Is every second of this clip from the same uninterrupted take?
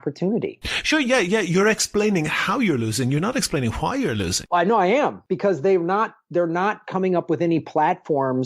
no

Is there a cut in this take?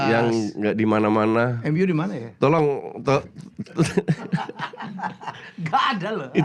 no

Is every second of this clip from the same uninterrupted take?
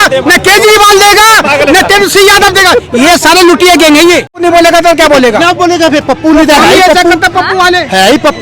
no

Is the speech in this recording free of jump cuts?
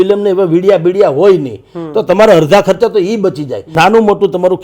no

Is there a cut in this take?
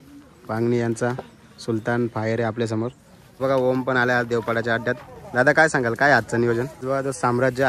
yes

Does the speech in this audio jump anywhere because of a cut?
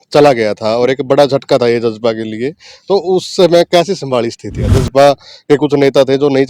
yes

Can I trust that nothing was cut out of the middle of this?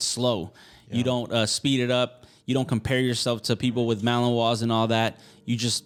yes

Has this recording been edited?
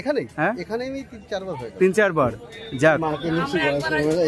no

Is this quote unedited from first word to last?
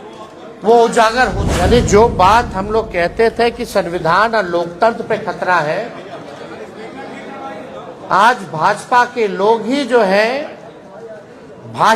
no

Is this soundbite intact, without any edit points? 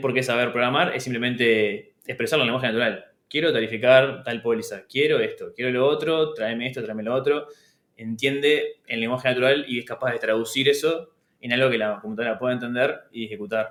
yes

